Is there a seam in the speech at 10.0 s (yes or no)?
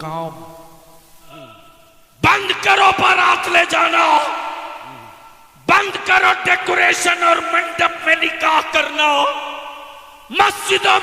no